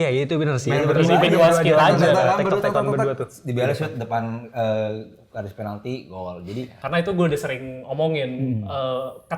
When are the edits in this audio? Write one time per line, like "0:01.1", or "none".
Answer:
0:06.7

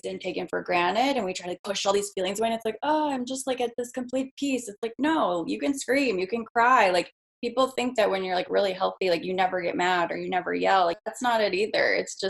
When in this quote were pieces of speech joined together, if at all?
0:11.0

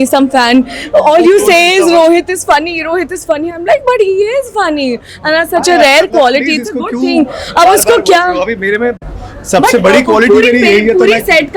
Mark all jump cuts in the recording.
none

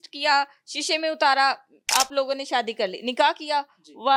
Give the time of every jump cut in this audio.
none

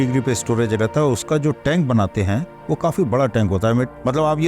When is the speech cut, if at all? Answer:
none

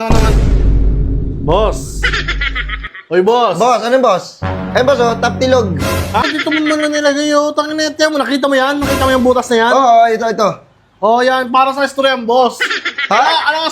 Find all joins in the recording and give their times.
0:06.2

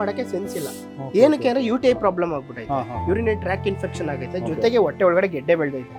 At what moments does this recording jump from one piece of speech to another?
none

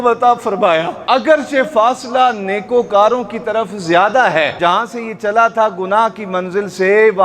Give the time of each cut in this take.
0:01.0
0:04.6

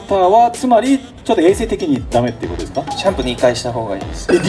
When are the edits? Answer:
none

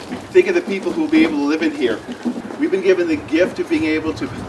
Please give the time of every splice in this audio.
0:02.4

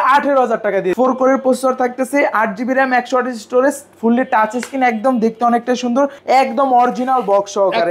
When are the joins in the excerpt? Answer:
0:00.9
0:06.2

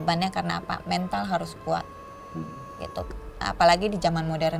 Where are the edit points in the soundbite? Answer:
none

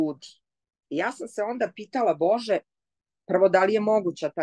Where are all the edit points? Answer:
none

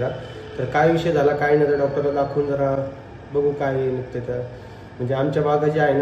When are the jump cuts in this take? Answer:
none

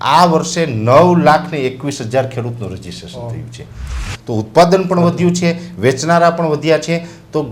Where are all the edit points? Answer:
0:04.1

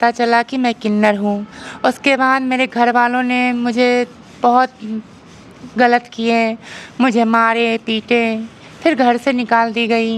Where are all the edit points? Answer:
none

